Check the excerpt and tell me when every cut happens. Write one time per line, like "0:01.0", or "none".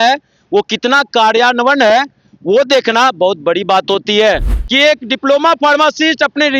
0:04.6